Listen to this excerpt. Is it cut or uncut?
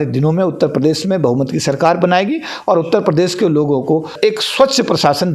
cut